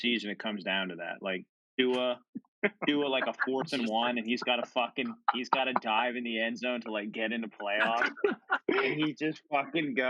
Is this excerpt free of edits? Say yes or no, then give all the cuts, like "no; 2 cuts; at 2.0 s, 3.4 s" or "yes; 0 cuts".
yes; 0 cuts